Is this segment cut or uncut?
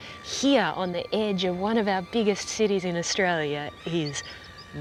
uncut